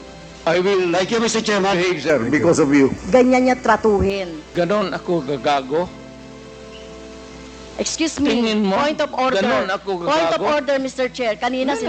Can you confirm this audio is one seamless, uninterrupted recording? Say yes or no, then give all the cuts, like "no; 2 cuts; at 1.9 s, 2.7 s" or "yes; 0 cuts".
no; 2 cuts; at 3.0 s, 4.3 s